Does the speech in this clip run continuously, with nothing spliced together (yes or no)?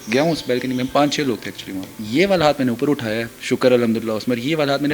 no